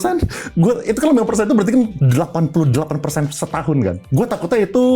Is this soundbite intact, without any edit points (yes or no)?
no